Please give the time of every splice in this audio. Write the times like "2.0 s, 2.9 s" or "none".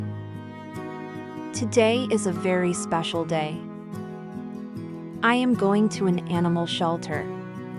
3.5 s, 4.9 s